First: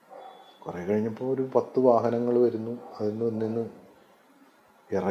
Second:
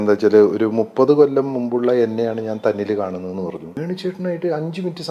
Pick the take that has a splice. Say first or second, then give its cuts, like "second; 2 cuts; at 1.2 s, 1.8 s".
second; 1 cut; at 3.7 s